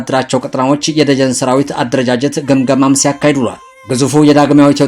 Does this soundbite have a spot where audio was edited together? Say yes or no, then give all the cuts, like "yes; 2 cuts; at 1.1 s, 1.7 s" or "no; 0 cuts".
no; 0 cuts